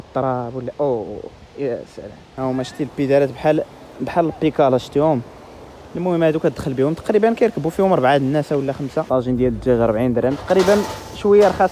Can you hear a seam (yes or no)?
yes